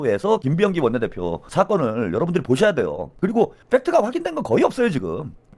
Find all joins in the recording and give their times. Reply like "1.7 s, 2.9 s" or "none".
none